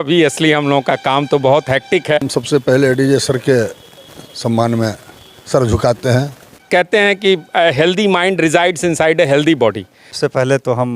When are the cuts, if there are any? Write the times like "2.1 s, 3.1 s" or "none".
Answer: 2.2 s, 6.6 s, 10.0 s